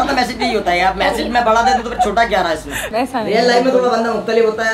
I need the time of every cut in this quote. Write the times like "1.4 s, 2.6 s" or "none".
2.8 s